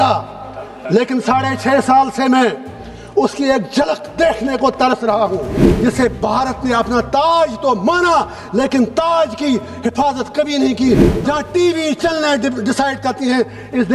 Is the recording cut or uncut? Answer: cut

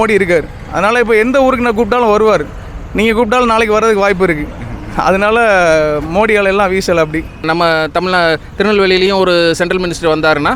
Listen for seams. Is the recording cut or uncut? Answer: cut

